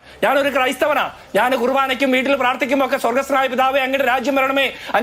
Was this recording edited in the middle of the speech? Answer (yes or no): no